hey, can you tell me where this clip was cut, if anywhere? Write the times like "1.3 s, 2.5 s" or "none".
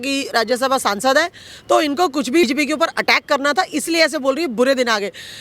2.5 s